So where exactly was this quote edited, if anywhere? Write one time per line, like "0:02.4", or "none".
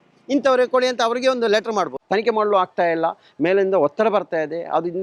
0:02.0